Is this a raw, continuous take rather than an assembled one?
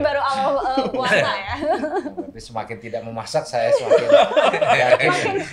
yes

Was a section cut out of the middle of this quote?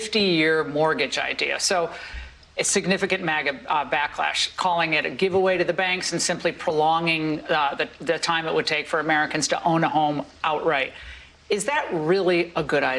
no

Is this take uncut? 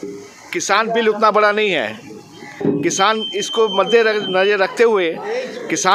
yes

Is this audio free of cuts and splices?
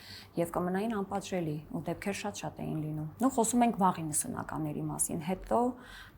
yes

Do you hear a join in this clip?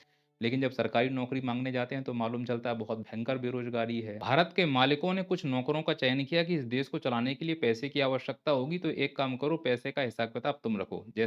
yes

